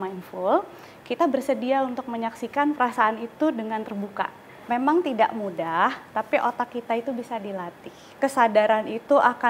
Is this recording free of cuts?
no; 2 cuts; at 4.6 s, 8.1 s

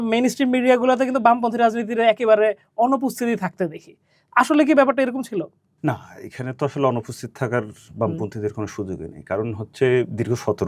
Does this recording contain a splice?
no; 0 cuts

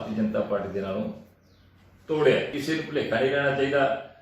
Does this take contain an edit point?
yes; 1 cut; at 2.5 s

